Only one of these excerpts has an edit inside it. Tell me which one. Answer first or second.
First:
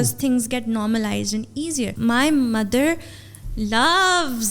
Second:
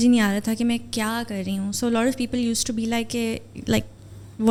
first